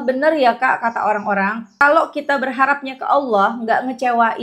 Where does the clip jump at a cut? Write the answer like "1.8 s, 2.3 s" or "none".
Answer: 1.7 s

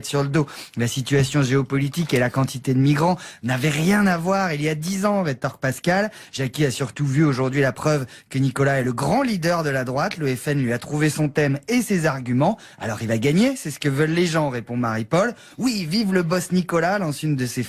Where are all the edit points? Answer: 3.4 s

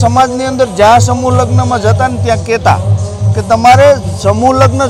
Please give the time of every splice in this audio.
none

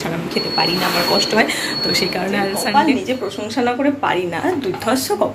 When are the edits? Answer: 2.6 s

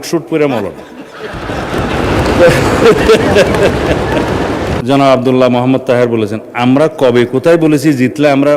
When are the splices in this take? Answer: 4.8 s

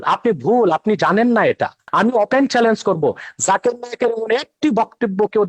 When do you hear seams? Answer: 1.8 s

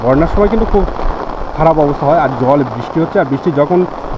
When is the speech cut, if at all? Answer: none

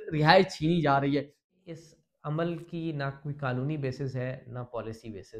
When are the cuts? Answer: 1.4 s

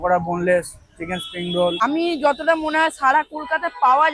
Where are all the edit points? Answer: 1.8 s

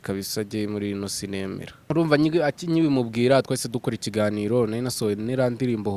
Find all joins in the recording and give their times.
1.7 s

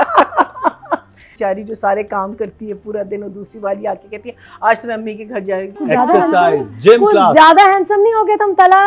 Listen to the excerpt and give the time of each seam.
1.3 s, 5.7 s

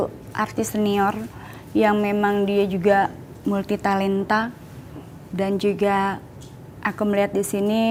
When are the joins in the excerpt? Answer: none

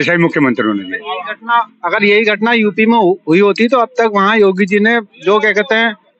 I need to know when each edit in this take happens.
none

